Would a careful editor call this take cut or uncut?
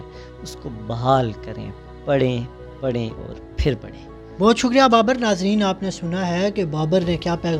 uncut